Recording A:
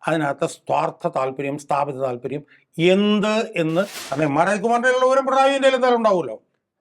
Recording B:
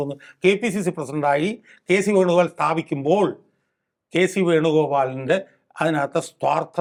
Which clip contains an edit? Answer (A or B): A